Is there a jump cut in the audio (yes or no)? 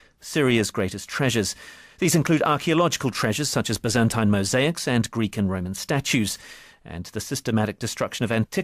yes